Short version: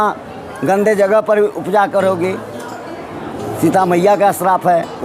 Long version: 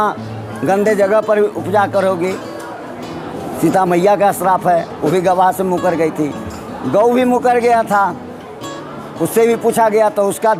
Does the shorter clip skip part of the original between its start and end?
no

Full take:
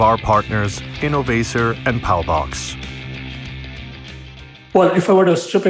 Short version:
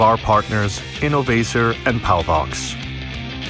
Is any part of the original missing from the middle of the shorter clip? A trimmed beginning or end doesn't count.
yes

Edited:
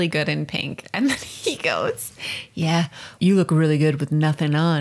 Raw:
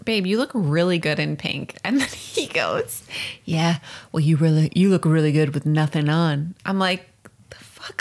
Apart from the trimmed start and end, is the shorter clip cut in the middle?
yes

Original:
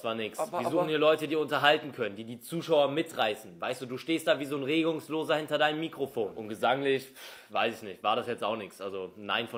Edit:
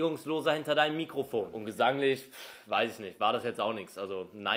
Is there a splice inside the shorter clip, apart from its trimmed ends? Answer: no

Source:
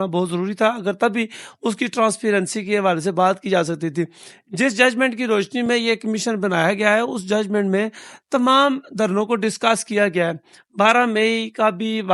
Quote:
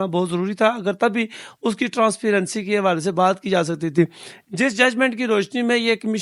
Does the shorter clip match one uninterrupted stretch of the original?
yes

